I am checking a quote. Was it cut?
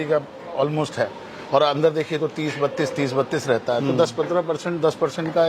no; 0 cuts

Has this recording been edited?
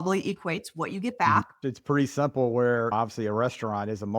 yes; 1 cut; at 1.6 s

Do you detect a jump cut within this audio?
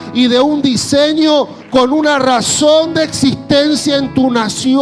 no; 0 cuts

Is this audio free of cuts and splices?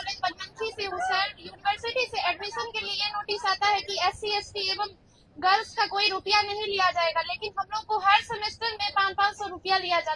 yes; 0 cuts

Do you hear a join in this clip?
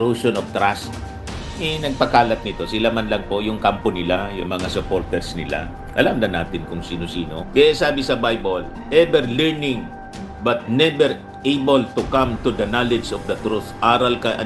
yes; 1 cut; at 7.4 s

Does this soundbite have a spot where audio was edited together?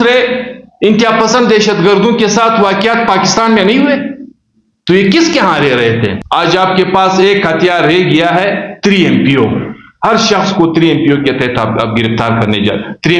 yes; 1 cut; at 6.2 s

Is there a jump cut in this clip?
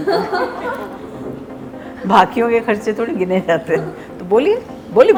no; 0 cuts

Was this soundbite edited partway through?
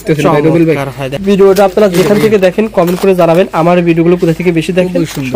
yes; 1 cut; at 1.0 s

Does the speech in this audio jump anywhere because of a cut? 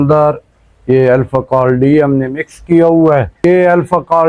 yes; 1 cut; at 3.3 s

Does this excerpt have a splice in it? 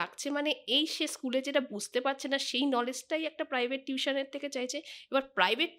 no; 0 cuts

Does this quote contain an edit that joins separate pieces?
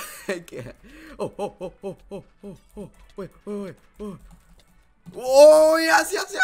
no; 0 cuts

